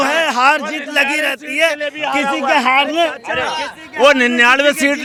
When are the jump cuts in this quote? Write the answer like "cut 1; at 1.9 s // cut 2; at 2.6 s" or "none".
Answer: none